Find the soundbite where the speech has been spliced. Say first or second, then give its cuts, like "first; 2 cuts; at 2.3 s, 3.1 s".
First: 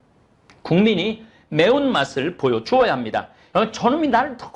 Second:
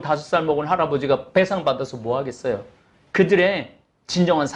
first; 1 cut; at 3.3 s